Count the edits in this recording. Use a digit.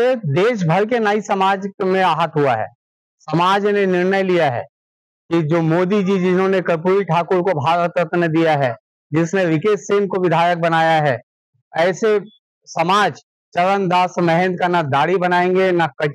0